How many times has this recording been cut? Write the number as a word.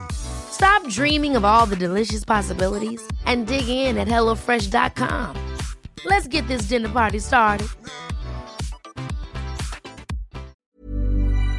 one